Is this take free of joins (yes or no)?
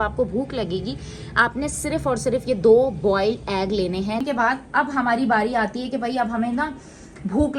no